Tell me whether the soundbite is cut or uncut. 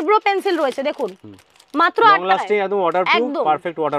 uncut